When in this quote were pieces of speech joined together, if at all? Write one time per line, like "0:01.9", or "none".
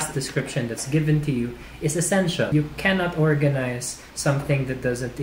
0:02.5